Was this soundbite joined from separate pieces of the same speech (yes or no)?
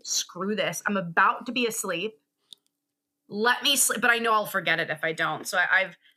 no